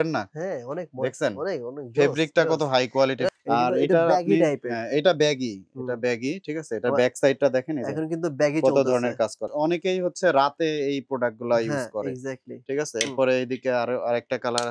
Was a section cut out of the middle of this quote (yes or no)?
yes